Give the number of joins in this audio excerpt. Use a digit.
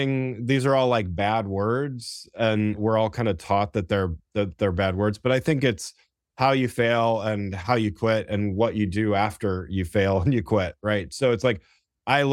1